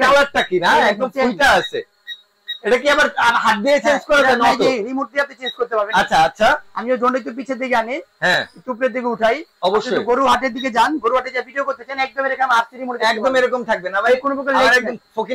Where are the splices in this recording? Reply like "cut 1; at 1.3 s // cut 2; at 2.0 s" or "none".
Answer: none